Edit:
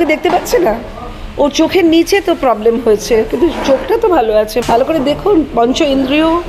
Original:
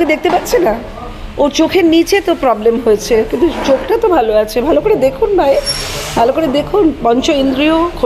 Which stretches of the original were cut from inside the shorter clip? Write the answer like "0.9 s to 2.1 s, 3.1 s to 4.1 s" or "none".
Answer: 4.6 s to 6.0 s